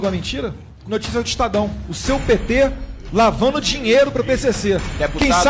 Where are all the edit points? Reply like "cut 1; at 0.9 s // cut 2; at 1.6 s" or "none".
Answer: none